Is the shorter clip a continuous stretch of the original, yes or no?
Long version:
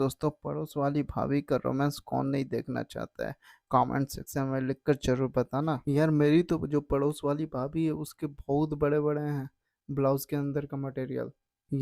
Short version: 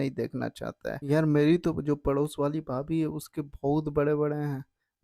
no